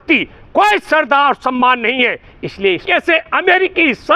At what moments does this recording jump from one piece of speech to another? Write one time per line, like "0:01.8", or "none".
0:02.8

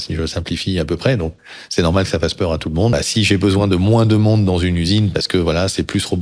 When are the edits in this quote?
0:02.9

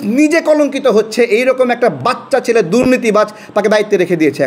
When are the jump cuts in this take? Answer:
none

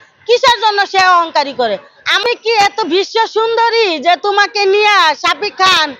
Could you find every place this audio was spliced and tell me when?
0:02.2

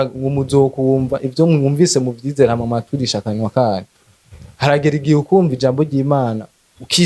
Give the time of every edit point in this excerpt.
none

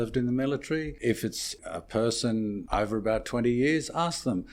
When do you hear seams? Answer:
0:01.5
0:02.6

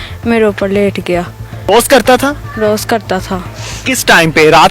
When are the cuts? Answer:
0:01.6

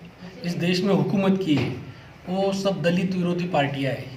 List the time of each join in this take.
none

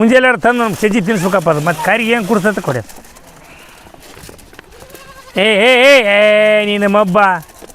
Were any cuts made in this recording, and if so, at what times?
0:03.6

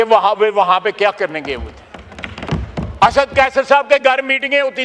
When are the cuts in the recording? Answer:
0:02.4

